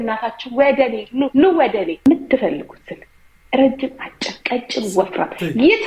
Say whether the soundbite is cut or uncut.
cut